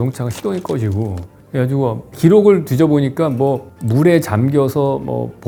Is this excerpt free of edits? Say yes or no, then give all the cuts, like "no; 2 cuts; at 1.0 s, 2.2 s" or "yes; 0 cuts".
yes; 0 cuts